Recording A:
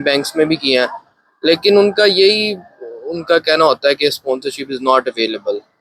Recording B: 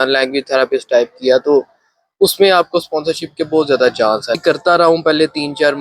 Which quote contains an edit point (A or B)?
B